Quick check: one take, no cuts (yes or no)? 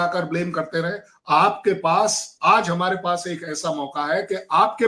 yes